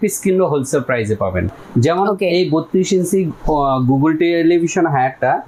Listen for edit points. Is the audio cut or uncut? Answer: uncut